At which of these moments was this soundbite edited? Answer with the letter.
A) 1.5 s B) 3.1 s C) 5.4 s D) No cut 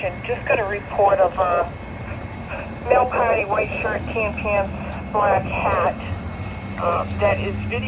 D